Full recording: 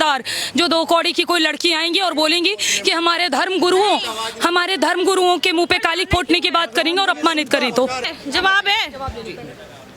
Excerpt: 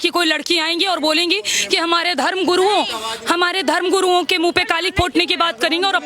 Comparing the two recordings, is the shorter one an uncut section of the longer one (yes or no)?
yes